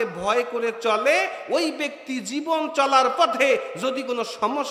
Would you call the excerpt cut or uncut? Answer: uncut